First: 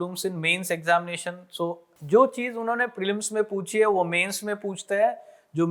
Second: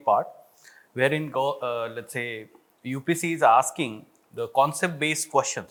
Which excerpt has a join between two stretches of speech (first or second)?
first